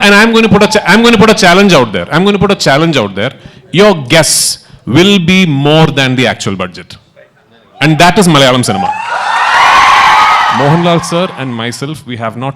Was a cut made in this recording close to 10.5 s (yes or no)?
yes